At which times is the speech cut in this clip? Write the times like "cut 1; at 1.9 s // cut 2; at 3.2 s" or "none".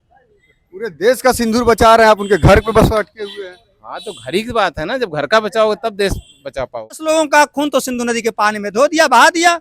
cut 1; at 7.0 s